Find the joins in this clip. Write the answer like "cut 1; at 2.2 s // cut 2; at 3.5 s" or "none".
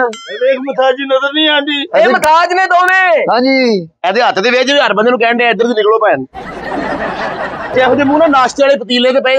cut 1; at 7.7 s